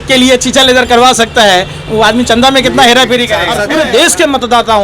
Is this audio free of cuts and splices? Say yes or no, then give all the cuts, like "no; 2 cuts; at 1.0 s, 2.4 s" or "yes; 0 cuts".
no; 1 cut; at 3.6 s